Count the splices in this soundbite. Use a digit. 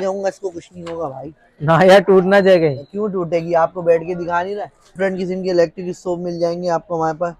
1